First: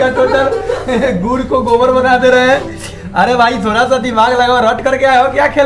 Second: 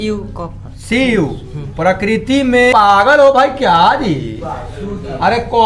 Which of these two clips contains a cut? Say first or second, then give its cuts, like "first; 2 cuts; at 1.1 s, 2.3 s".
second; 1 cut; at 2.7 s